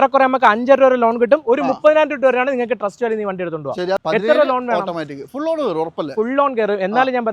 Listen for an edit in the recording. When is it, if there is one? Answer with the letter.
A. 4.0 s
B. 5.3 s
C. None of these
A